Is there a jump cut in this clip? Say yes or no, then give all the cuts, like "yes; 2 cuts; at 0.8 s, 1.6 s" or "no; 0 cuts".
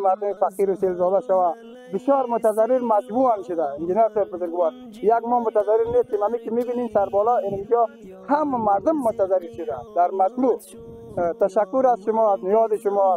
no; 0 cuts